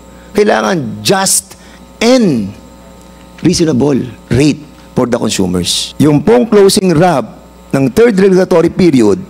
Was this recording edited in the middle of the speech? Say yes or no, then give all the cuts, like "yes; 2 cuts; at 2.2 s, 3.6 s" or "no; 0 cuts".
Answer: yes; 1 cut; at 5.8 s